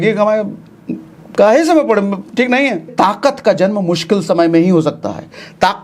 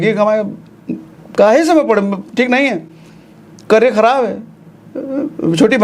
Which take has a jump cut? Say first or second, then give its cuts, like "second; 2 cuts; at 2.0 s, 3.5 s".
first; 1 cut; at 2.9 s